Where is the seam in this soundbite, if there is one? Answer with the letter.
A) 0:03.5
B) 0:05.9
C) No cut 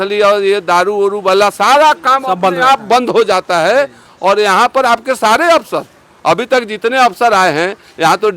C